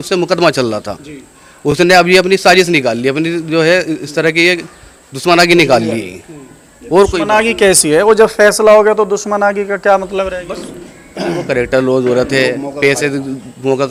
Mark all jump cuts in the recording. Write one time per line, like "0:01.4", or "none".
none